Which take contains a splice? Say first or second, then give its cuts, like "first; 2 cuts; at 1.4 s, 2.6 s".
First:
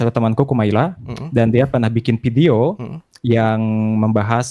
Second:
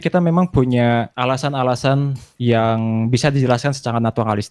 second; 1 cut; at 1.1 s